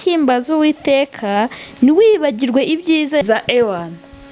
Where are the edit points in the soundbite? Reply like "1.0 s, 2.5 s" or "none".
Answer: 3.2 s